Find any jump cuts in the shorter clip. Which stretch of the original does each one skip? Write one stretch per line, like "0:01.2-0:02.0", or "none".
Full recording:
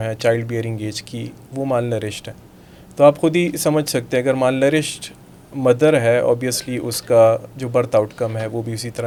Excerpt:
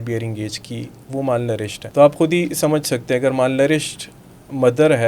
0:02.2-0:02.8